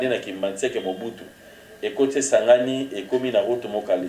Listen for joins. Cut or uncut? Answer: uncut